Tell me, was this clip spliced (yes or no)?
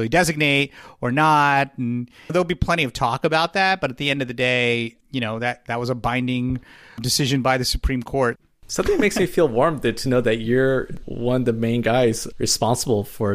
yes